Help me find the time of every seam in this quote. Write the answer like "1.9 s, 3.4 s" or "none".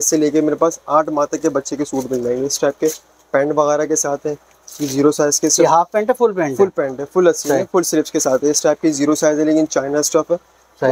none